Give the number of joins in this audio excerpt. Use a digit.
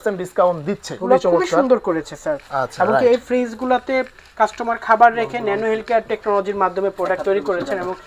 1